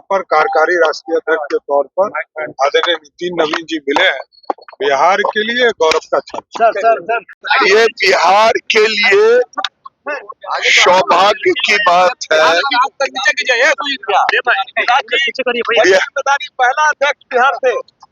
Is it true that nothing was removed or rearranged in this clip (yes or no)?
yes